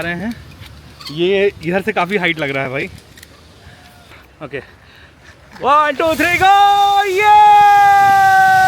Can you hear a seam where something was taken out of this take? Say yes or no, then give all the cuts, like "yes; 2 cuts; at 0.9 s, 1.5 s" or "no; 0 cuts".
yes; 1 cut; at 4.3 s